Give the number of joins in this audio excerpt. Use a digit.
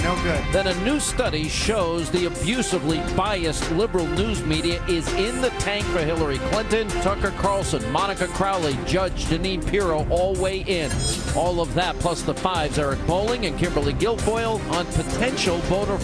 1